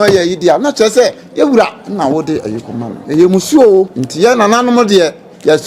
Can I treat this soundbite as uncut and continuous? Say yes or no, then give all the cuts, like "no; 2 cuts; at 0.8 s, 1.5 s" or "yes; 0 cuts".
no; 2 cuts; at 3.0 s, 4.0 s